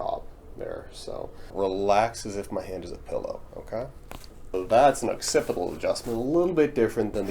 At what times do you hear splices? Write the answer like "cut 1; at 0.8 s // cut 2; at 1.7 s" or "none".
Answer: cut 1; at 1.5 s // cut 2; at 4.5 s